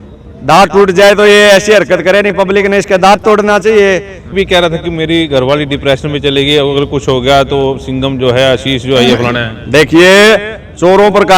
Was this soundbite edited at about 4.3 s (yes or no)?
yes